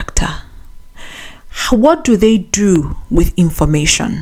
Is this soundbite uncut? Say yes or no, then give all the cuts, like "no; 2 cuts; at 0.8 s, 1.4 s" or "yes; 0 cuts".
yes; 0 cuts